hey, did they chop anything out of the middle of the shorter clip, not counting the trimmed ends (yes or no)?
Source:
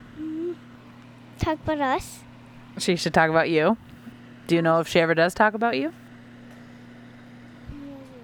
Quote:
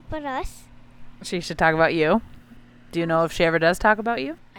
no